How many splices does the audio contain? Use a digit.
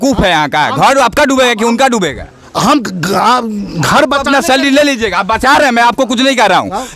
0